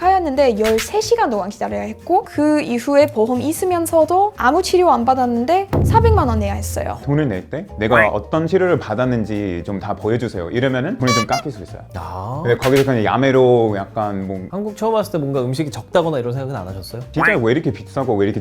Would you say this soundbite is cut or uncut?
cut